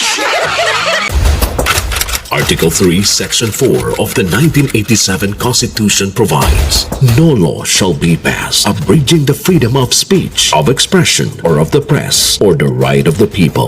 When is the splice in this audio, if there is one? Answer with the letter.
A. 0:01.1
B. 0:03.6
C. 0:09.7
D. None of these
A